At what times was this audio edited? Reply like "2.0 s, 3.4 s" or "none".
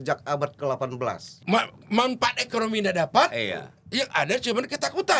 1.3 s